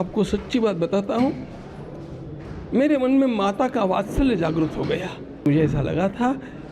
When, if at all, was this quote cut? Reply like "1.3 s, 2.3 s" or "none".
5.5 s